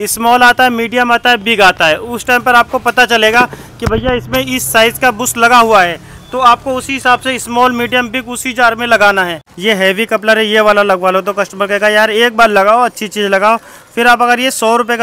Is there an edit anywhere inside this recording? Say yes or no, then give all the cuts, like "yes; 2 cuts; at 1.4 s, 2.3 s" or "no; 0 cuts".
yes; 1 cut; at 9.5 s